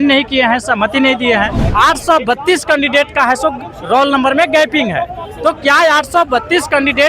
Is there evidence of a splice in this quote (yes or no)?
yes